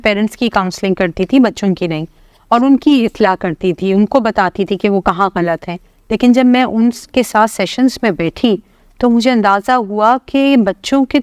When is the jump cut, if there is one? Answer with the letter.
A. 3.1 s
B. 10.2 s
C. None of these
C